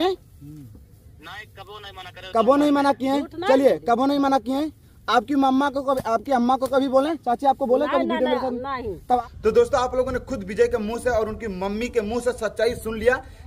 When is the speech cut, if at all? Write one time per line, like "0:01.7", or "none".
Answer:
0:09.2